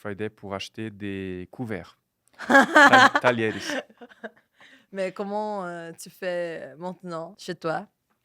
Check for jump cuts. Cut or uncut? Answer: cut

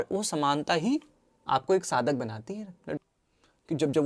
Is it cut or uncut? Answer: cut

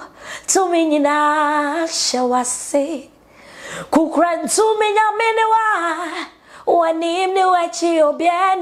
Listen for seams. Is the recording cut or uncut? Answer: uncut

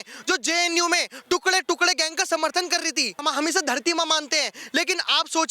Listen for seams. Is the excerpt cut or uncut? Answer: cut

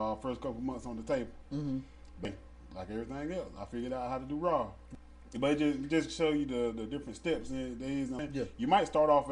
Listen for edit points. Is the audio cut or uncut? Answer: cut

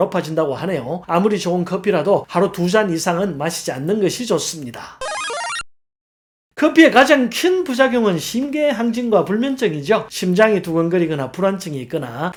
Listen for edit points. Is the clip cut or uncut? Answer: uncut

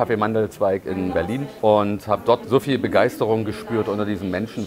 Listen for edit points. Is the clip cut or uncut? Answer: cut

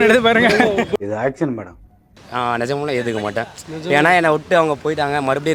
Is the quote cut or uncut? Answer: cut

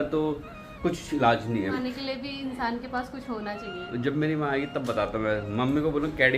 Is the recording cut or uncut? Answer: cut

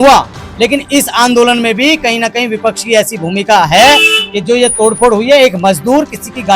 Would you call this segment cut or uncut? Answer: uncut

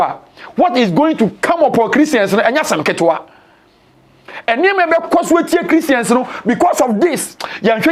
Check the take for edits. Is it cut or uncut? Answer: uncut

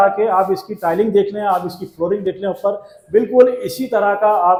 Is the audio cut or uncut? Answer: uncut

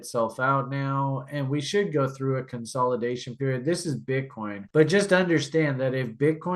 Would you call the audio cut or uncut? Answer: uncut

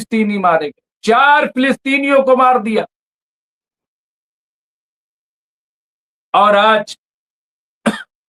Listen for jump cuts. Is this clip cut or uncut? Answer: uncut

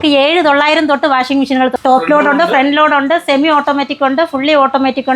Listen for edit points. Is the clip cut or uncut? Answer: uncut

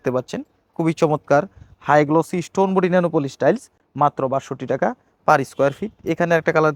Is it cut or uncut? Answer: uncut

